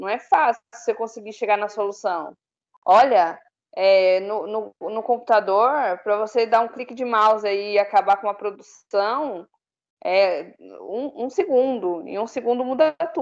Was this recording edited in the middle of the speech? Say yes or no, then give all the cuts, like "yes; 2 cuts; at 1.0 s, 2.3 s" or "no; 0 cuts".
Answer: no; 0 cuts